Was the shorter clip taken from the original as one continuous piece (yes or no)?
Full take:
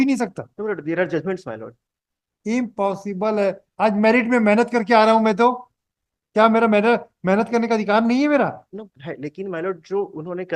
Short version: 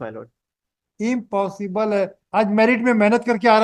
yes